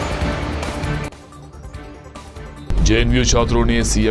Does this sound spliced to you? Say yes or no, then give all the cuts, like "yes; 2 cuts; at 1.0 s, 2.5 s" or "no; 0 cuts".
no; 0 cuts